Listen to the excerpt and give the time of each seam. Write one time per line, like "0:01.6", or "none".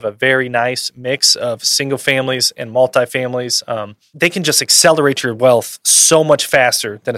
0:04.1